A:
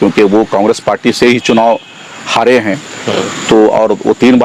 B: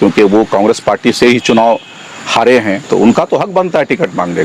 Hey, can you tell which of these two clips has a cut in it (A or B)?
B